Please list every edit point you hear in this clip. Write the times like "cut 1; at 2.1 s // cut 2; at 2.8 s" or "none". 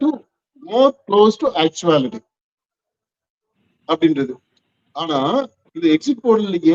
none